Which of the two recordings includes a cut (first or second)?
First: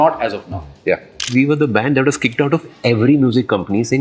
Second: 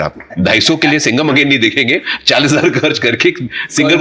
first